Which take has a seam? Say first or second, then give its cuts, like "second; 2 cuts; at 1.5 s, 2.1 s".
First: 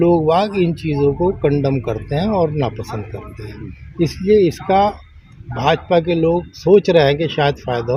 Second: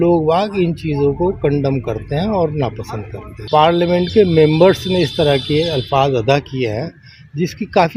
second; 1 cut; at 3.4 s